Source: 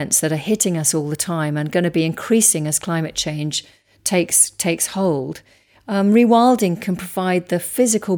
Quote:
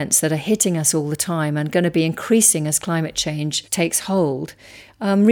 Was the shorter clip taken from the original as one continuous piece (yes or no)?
no